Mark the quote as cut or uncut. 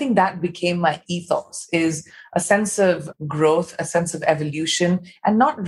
uncut